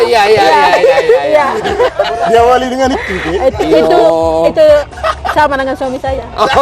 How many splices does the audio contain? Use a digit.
1